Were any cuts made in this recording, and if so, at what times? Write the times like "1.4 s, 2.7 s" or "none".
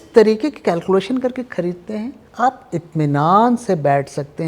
2.2 s